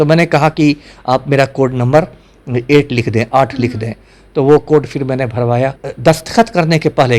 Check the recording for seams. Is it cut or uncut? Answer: cut